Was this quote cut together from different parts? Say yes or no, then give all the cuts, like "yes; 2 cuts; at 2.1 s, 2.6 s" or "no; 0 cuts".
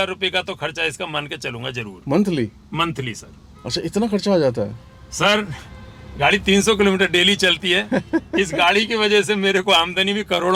no; 0 cuts